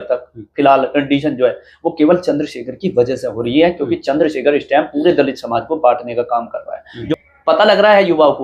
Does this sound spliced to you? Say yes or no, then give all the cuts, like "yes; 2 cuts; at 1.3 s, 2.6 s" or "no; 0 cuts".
yes; 1 cut; at 6.9 s